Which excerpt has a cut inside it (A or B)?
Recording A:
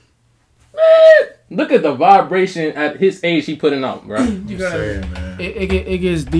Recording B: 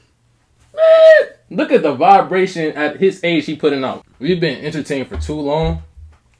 B